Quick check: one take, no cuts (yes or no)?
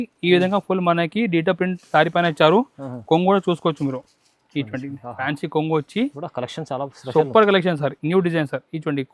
no